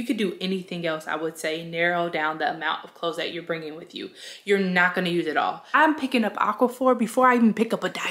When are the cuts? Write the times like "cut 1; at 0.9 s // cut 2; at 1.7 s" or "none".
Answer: cut 1; at 5.6 s